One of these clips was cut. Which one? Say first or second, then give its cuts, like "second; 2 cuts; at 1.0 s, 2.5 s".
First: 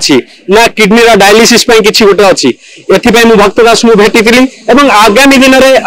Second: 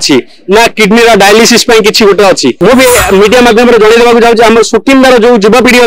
second; 1 cut; at 2.6 s